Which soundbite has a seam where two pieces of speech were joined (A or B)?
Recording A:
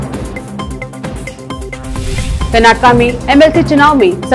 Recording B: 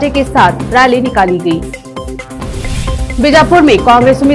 A